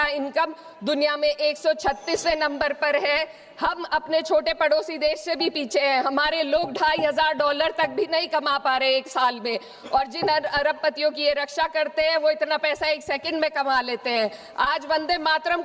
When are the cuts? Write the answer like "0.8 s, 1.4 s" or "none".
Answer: none